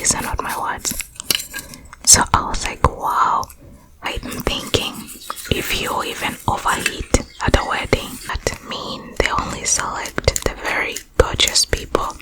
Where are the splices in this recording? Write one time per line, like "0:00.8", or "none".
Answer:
0:04.1
0:08.3